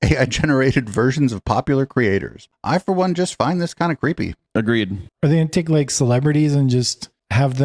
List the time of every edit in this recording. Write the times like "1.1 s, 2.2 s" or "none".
2.5 s, 5.0 s

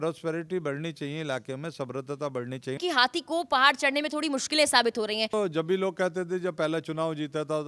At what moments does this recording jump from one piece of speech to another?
2.8 s, 5.3 s

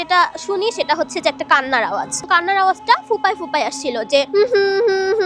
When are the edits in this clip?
2.2 s

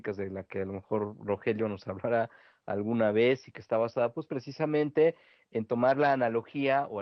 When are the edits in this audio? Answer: none

